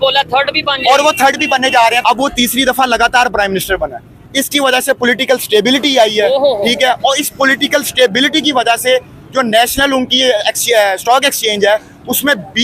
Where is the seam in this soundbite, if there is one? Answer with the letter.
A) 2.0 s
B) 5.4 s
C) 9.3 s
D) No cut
A